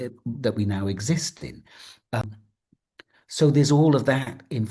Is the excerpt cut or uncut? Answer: cut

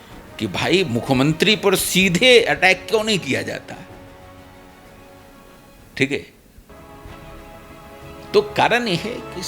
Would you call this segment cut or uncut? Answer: uncut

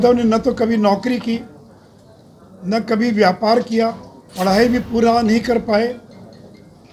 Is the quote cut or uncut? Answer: uncut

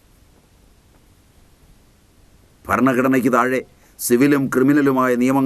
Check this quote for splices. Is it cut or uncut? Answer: uncut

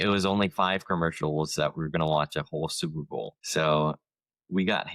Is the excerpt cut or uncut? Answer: cut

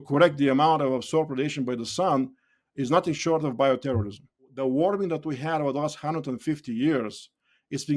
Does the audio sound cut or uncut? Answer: cut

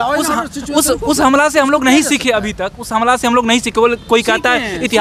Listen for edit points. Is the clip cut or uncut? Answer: uncut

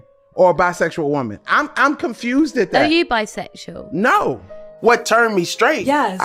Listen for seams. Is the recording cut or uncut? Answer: uncut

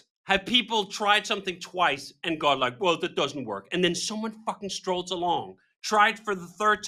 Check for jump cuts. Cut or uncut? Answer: uncut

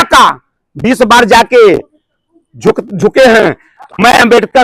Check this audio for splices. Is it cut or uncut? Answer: uncut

